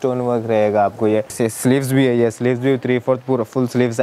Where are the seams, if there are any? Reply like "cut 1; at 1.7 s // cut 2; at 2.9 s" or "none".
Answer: cut 1; at 1.3 s